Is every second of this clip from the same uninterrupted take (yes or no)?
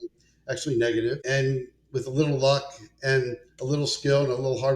no